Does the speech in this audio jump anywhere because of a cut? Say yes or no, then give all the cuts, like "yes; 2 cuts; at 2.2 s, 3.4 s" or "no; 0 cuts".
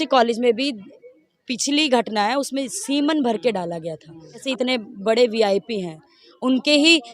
yes; 1 cut; at 4.4 s